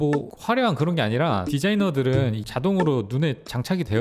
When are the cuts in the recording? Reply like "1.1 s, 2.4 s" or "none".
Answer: 1.5 s, 2.4 s